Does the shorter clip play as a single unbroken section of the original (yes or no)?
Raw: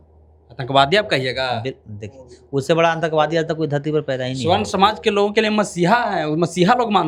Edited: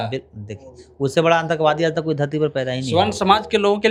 yes